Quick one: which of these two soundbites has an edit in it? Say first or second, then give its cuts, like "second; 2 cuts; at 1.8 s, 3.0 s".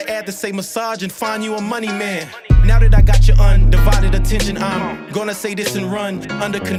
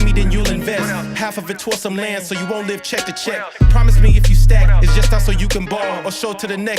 second; 1 cut; at 5.8 s